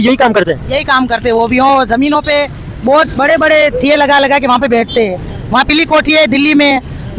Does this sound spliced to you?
no; 0 cuts

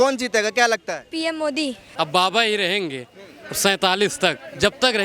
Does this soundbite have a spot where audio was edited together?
yes; 1 cut; at 1.8 s

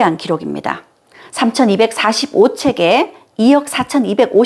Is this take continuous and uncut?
yes; 0 cuts

